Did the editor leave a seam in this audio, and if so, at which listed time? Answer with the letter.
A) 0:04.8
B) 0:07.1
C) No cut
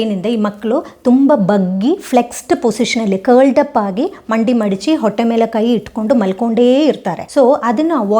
B